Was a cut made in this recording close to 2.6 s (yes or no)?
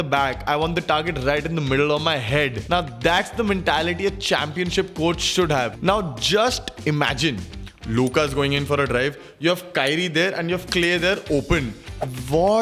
yes